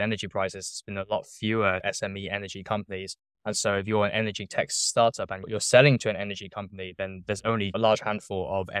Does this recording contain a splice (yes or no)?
yes